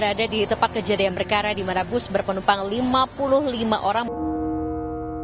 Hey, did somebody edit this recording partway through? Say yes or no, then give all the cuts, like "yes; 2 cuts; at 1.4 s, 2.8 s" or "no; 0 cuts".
yes; 1 cut; at 4.1 s